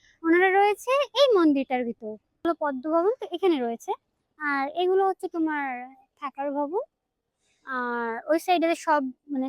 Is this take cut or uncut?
cut